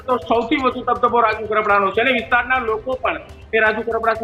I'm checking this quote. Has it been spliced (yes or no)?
no